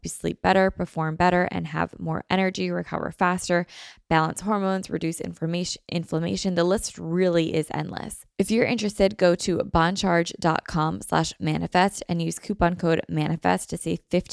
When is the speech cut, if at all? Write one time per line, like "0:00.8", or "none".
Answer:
0:08.2